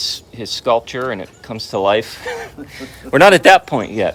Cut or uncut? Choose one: uncut